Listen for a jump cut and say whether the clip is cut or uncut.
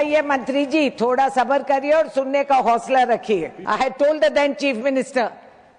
cut